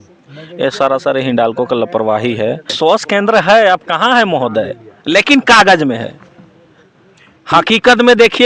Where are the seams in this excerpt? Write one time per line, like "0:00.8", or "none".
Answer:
0:02.7